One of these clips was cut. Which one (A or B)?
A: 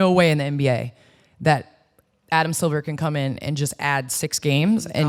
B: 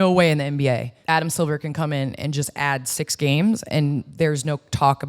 B